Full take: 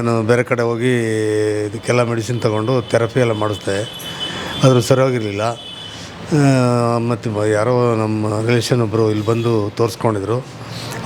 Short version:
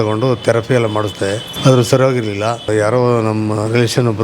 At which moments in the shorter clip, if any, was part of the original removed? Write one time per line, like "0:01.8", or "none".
0:01.5
0:02.6